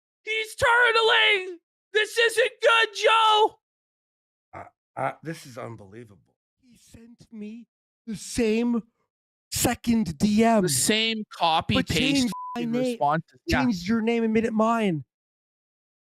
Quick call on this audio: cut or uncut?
cut